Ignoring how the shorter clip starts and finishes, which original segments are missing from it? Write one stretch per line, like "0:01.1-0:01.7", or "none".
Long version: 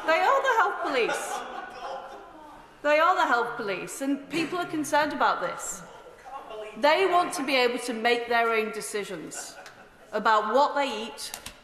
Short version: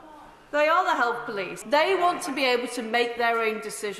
0:03.9-0:06.7